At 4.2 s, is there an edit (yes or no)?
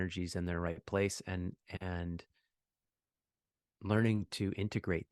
no